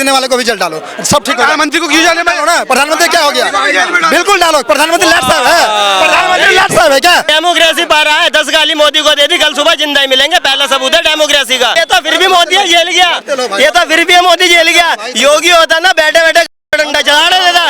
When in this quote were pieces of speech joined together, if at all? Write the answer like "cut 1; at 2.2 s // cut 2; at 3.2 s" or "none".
cut 1; at 7.3 s // cut 2; at 11.7 s